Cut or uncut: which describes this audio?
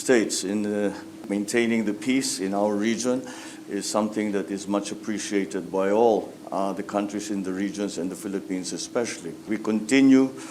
cut